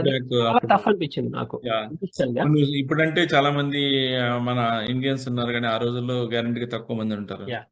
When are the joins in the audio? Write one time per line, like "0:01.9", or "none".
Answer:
none